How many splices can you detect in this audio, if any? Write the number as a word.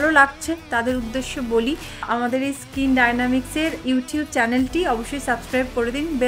one